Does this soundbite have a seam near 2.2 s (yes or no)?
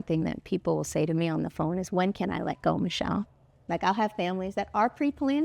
no